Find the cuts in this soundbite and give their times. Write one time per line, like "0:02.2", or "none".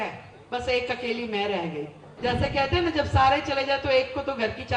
0:02.0